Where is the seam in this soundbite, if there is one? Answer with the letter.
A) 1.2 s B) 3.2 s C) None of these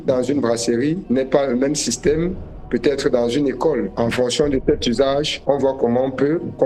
C